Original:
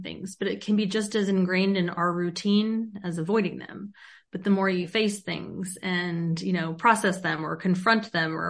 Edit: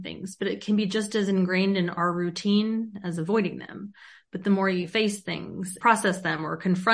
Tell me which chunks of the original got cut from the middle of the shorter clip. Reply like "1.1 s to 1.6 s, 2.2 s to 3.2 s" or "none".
5.7 s to 6.7 s